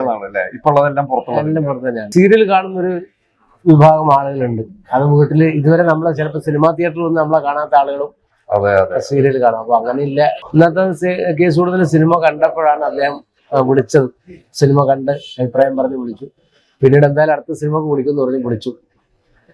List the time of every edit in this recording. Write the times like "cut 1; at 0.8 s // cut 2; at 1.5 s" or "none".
cut 1; at 2.1 s // cut 2; at 10.4 s